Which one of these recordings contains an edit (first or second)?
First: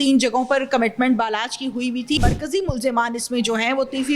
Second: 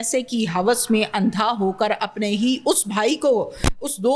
first